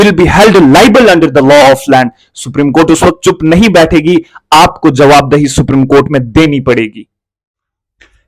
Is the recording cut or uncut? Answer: uncut